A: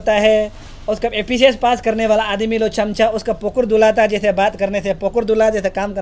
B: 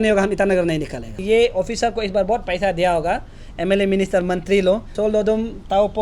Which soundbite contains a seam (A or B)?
B